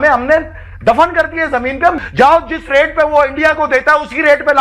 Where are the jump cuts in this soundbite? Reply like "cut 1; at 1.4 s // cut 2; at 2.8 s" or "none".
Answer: cut 1; at 2.0 s